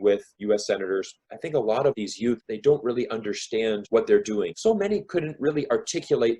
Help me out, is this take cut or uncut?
cut